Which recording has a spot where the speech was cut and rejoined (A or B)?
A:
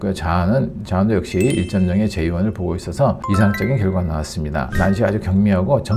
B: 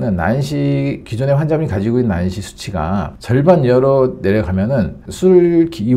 A